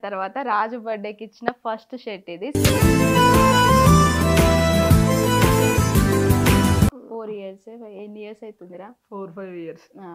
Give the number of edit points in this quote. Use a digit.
1